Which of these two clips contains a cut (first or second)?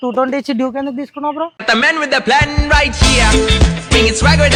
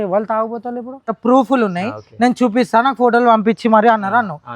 second